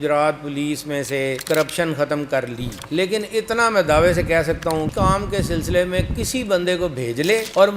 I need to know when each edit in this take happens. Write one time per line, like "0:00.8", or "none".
0:04.9